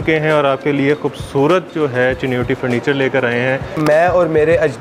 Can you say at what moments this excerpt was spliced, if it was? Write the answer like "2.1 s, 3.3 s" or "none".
3.8 s